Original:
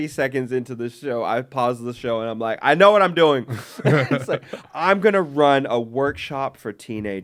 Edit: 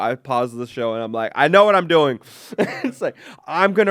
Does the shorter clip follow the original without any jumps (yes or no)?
yes